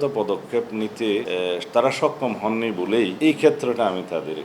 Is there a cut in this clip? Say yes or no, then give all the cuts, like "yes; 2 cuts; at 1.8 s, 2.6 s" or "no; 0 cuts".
yes; 2 cuts; at 1.3 s, 3.1 s